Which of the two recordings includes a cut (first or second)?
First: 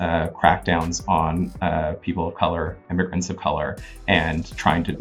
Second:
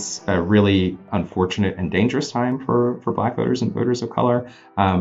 second